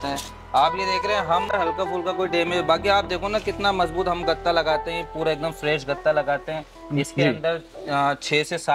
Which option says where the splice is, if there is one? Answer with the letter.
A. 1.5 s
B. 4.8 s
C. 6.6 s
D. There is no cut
A